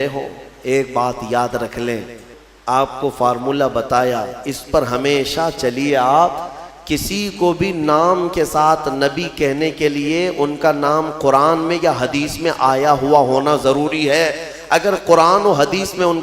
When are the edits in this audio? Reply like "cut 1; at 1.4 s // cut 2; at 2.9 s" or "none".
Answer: cut 1; at 2.3 s